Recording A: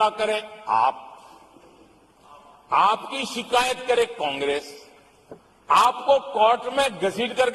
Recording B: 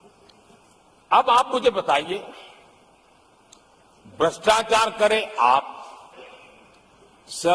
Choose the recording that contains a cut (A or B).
B